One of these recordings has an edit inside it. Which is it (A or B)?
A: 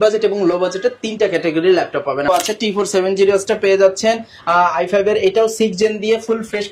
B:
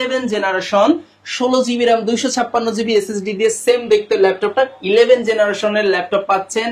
A